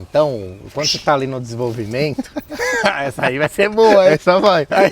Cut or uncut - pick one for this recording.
uncut